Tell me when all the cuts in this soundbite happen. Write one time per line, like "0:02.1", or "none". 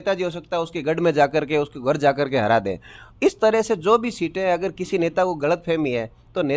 none